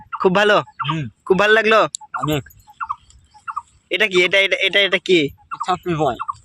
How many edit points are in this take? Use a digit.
0